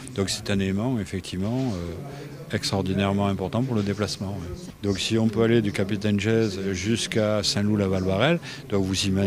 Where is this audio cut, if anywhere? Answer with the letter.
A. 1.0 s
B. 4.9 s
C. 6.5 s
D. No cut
C